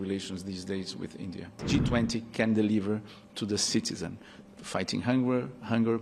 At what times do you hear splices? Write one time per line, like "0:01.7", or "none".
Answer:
0:01.6